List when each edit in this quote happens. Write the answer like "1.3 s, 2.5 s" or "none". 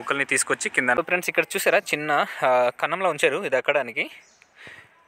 1.0 s